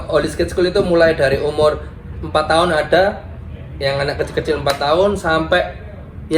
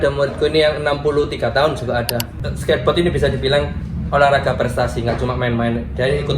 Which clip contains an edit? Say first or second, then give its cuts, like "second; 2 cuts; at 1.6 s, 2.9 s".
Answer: second; 1 cut; at 2.3 s